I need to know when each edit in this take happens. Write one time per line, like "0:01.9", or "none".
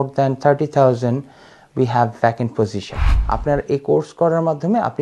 0:03.1

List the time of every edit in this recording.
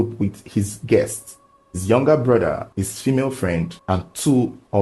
0:02.7
0:03.8

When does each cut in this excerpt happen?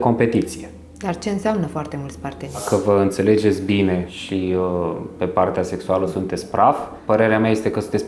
0:02.6
0:04.2
0:07.0

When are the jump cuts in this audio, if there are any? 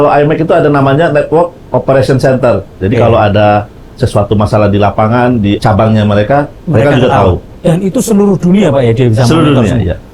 0:02.7
0:05.6
0:06.6
0:07.5

